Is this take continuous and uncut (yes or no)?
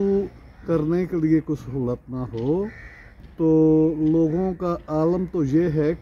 yes